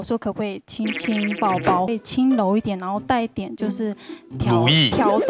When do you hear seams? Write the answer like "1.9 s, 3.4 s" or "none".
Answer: 1.9 s